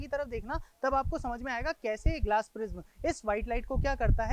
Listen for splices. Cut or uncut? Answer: uncut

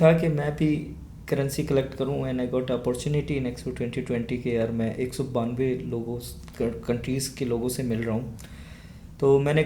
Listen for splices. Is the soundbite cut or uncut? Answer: uncut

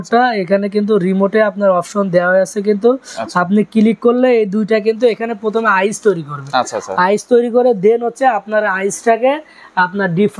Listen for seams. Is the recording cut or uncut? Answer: uncut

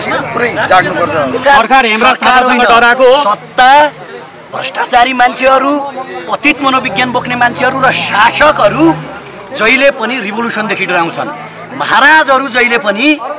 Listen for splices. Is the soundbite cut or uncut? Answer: cut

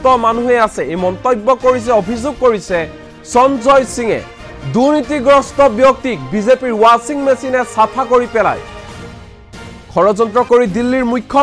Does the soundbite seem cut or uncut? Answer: cut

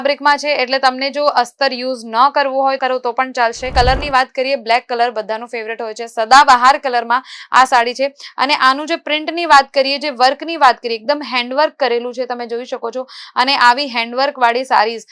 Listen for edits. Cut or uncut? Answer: cut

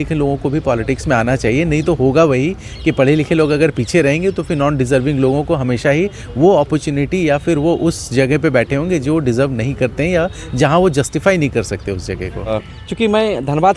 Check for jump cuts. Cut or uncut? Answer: cut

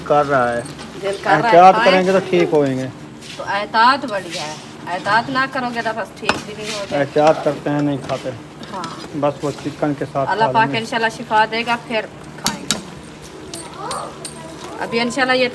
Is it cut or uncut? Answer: uncut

